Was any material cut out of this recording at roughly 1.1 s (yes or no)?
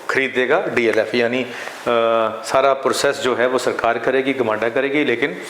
no